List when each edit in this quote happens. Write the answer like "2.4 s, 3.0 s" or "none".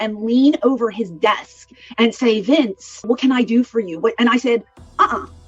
3.1 s